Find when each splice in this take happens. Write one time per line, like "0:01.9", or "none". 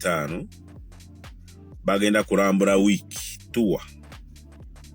0:03.9